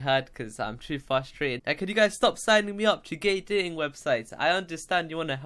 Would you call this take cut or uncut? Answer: uncut